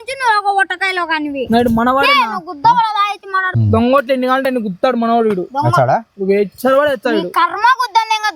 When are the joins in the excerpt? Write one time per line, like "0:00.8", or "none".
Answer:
0:03.5